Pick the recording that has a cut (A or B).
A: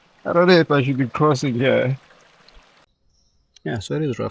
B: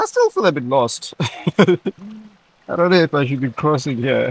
A